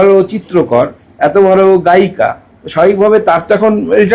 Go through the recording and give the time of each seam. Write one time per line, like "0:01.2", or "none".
none